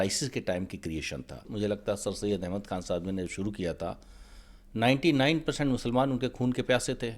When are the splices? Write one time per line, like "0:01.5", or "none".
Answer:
0:01.5